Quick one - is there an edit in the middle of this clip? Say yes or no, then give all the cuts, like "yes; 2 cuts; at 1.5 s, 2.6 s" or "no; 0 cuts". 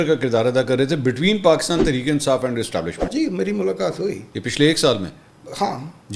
yes; 1 cut; at 3.0 s